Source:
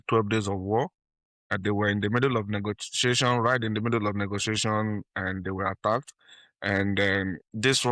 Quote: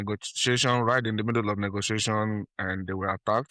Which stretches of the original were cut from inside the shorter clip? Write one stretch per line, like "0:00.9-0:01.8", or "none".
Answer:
none